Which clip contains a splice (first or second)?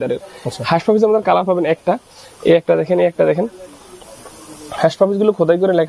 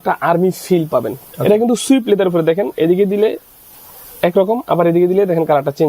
second